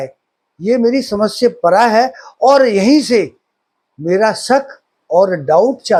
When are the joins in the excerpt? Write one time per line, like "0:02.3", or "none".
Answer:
none